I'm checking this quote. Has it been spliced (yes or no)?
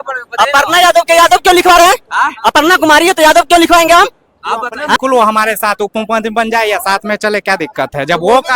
yes